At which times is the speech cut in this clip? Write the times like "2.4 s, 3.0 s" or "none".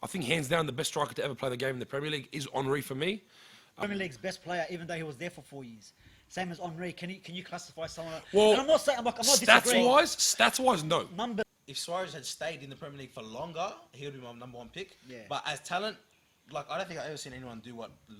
3.8 s, 11.5 s